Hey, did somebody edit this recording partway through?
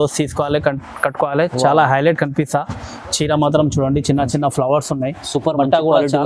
no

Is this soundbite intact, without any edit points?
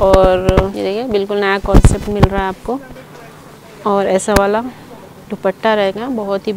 yes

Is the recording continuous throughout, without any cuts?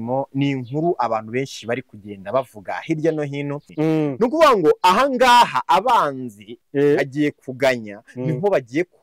no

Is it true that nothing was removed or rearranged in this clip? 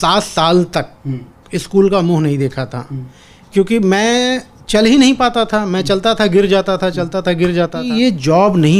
no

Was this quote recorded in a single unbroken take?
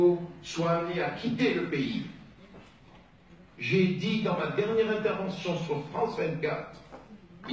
no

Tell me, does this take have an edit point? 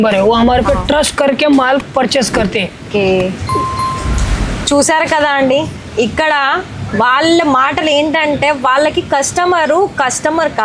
no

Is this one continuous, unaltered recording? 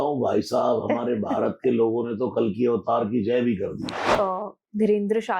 no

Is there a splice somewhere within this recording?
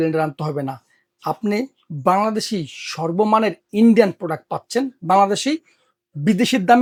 no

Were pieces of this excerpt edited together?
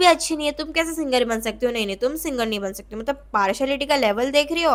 no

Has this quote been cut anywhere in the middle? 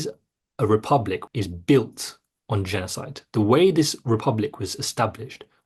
yes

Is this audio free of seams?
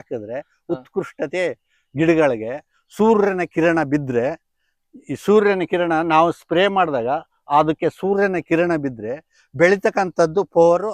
yes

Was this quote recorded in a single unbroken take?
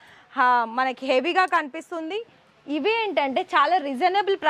yes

